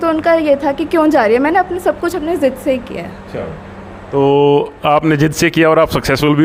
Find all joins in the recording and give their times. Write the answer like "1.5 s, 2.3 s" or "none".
none